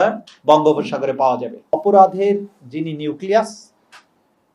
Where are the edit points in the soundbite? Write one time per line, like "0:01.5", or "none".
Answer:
0:01.8

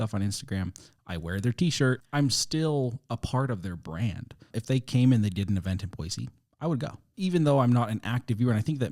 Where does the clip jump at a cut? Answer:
0:02.0
0:04.3
0:07.0

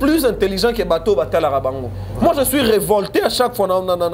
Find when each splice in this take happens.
none

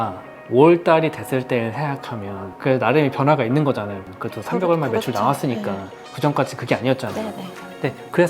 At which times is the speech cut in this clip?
0:02.4
0:04.0

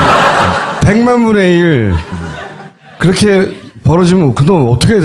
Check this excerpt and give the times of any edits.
0:03.3

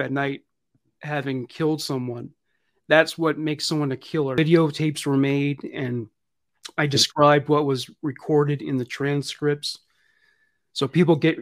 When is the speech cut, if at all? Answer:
0:04.4

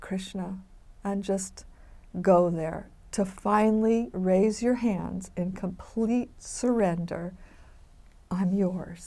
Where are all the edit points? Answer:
none

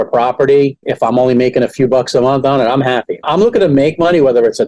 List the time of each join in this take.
0:03.2

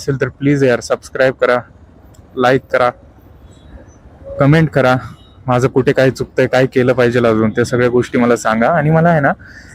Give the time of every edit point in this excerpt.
none

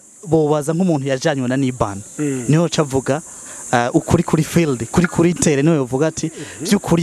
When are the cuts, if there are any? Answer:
none

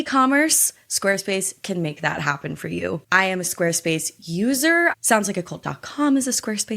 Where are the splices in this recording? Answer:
0:04.9

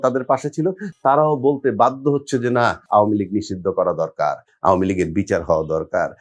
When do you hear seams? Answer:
0:00.9
0:02.9

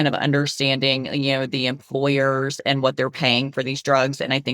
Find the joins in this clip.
none

